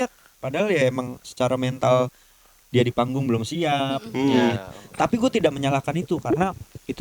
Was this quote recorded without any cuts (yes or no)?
yes